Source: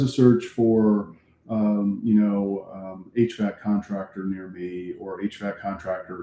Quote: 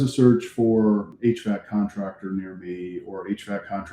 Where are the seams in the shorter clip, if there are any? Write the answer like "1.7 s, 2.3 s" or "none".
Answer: 1.1 s